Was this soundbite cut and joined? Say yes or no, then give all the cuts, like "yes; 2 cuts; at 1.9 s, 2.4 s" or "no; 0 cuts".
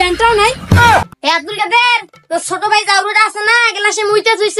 yes; 1 cut; at 1.1 s